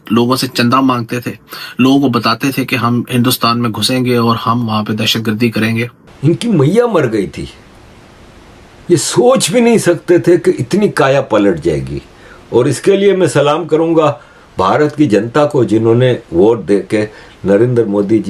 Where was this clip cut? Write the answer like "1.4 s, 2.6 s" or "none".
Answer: 6.0 s